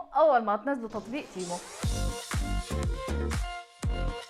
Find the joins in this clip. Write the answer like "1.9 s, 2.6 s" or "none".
1.7 s

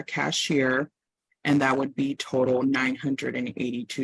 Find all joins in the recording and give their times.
none

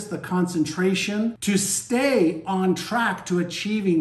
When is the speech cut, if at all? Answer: 1.4 s

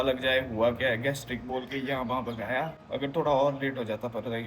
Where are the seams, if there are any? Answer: 2.8 s

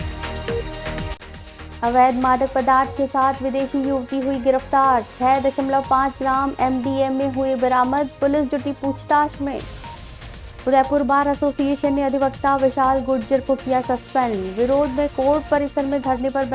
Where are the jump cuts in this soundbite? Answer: 1.1 s

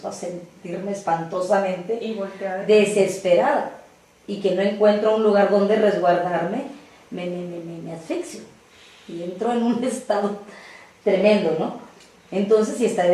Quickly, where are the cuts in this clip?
6.7 s

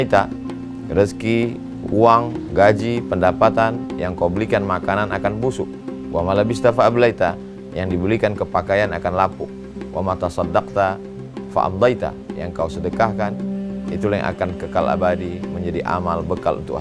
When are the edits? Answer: none

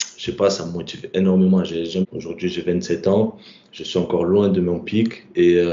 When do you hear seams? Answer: 2.0 s

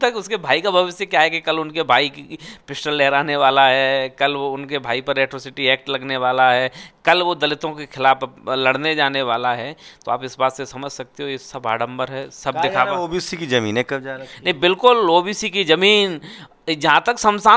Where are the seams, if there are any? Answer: none

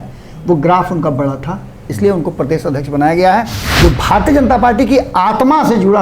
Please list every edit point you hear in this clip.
3.6 s

